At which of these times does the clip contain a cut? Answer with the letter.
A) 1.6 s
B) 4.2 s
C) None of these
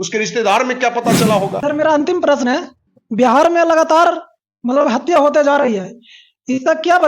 A